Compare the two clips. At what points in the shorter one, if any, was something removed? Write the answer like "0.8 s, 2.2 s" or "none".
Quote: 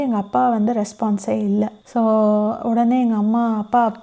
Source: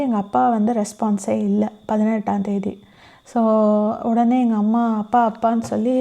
1.8 s